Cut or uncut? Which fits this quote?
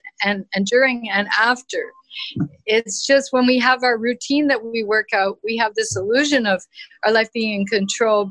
uncut